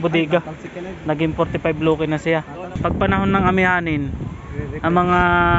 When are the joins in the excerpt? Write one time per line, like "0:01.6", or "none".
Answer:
0:02.7